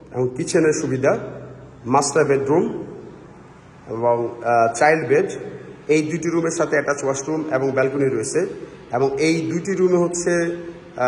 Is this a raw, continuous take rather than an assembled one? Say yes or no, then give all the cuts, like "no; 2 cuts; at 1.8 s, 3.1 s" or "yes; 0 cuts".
yes; 0 cuts